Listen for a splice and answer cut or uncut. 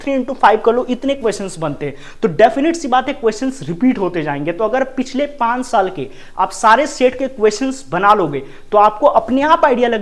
uncut